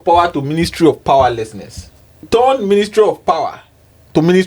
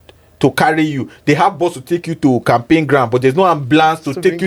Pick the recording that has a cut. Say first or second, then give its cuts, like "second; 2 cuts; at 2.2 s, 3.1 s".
first; 1 cut; at 2.2 s